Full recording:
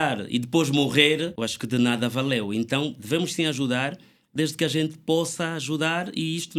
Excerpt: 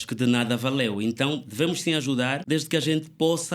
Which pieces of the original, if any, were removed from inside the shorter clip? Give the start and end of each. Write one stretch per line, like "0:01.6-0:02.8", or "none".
0:03.9-0:04.3

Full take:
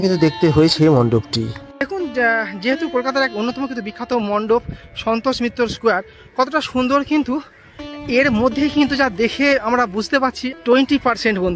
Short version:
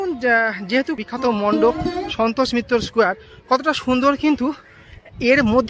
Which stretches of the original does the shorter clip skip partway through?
0:02.9-0:03.8

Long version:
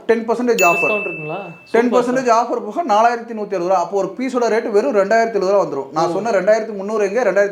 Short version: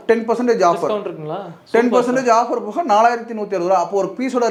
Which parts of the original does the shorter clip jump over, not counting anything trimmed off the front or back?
none

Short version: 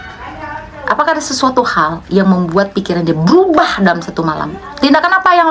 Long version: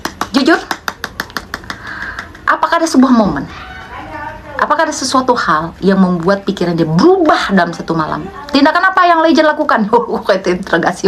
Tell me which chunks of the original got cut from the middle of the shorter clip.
none

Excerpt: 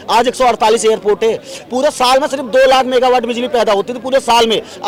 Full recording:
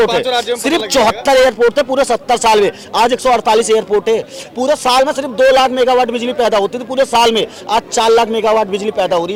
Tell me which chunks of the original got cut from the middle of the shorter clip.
none

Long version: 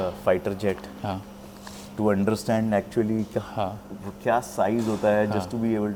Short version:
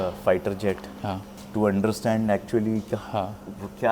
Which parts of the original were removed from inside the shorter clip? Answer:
0:01.3-0:01.8

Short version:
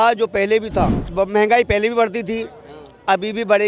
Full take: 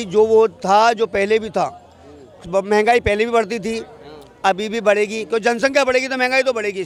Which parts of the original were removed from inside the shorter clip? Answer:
0:01.8-0:02.4

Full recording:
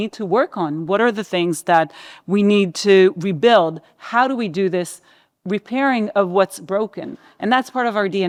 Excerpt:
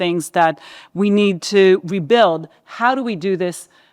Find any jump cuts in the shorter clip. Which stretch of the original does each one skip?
none

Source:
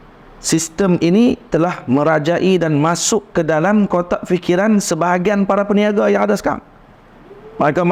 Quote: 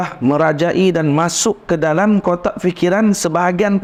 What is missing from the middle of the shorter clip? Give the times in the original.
none

